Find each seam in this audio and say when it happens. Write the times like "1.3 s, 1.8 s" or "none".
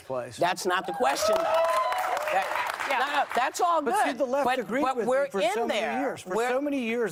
none

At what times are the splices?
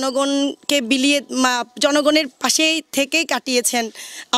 none

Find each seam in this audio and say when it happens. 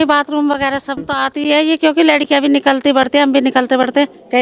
1.0 s

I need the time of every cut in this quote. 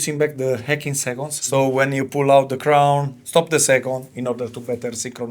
1.4 s

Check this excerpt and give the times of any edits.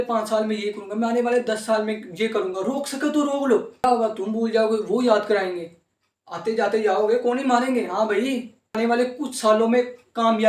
3.8 s, 8.8 s

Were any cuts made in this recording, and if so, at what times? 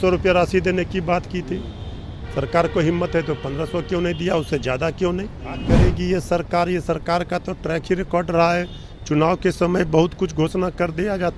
5.6 s

